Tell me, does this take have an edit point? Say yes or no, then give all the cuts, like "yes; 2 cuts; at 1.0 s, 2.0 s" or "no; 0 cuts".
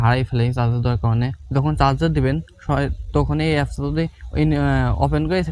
yes; 1 cut; at 1.4 s